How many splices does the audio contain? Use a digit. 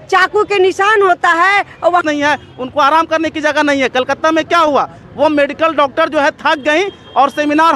1